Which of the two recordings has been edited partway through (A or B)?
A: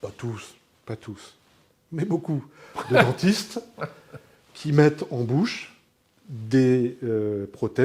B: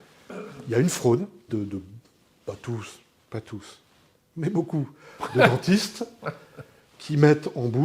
B